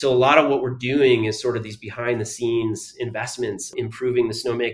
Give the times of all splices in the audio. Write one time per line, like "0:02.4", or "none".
none